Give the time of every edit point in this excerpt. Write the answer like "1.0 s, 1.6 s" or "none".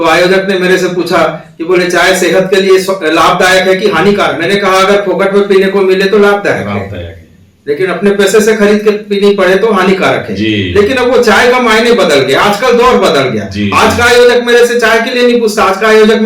none